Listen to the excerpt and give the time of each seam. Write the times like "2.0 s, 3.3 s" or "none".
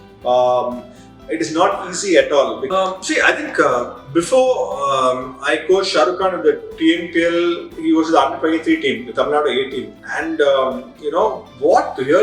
2.6 s